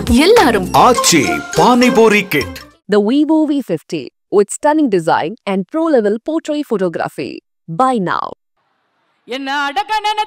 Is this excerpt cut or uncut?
cut